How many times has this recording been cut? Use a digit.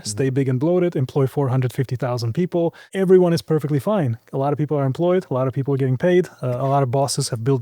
1